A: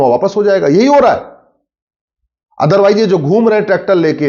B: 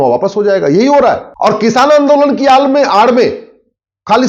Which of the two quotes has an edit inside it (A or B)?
B